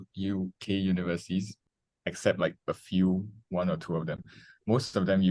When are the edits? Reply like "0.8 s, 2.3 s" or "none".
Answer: 1.5 s